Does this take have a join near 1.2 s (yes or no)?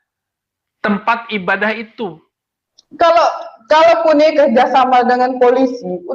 no